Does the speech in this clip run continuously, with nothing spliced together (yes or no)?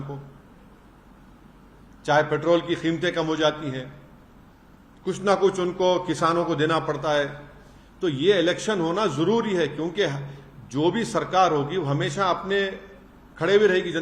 yes